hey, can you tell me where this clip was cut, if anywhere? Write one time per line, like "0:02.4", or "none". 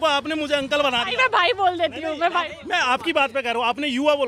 none